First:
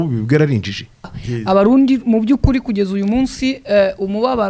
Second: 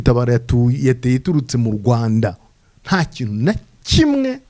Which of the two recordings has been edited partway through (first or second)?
first